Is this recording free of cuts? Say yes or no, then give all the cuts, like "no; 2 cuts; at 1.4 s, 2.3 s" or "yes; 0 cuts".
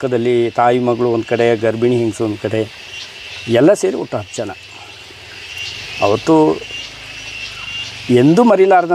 yes; 0 cuts